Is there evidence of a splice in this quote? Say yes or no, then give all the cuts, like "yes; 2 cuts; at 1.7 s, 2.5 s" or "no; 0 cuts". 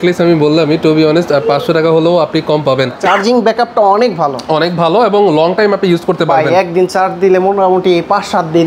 yes; 1 cut; at 3.0 s